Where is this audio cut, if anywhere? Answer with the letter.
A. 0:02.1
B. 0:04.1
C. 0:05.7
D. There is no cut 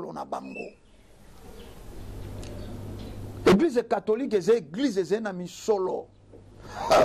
A